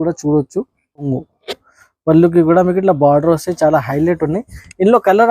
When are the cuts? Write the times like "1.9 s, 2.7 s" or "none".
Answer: 1.1 s